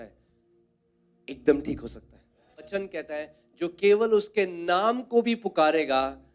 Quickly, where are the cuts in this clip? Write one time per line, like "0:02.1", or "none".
0:02.7